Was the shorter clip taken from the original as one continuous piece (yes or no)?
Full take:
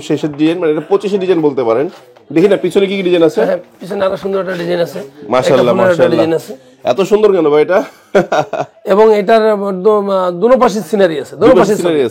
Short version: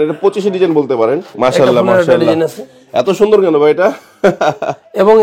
no